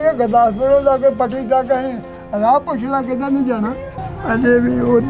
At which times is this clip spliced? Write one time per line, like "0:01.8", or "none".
0:03.9